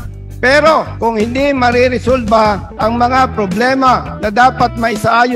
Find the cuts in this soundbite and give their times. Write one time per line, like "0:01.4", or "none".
0:00.9
0:02.7
0:04.1